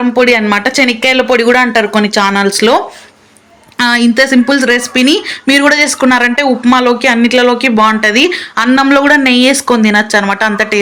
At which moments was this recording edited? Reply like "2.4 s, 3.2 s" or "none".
none

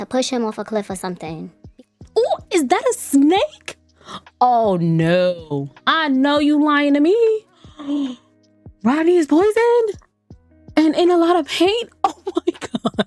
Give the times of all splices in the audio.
1.6 s, 7.7 s

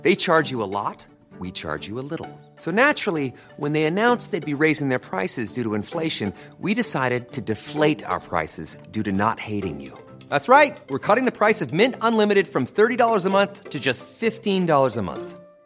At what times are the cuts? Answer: none

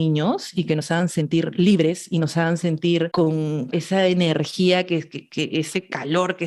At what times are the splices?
3.7 s

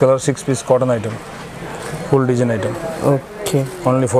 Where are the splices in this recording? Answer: none

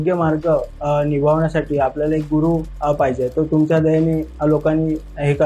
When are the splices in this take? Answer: none

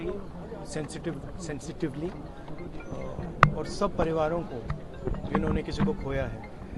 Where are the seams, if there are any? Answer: none

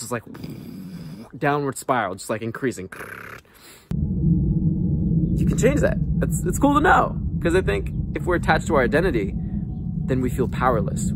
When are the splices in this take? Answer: 3.9 s

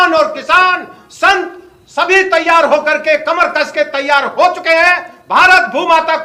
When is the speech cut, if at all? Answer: none

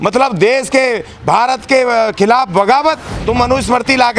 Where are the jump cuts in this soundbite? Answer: 3.1 s

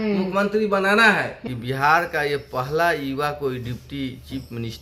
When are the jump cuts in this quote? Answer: 1.4 s

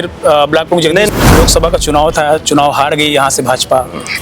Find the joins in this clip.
1.1 s

